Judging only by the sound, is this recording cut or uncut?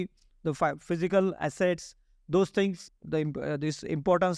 cut